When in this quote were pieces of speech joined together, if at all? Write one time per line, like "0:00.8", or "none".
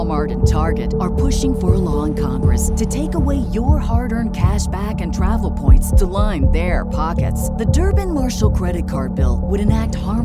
none